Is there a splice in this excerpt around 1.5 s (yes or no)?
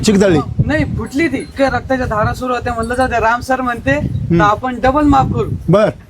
yes